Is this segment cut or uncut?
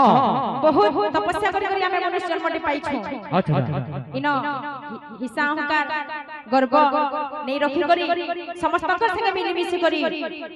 uncut